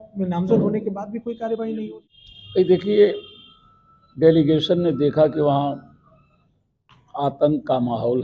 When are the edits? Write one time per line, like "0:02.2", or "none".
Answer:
0:01.8